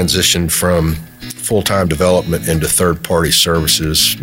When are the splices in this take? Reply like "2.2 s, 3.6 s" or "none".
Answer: none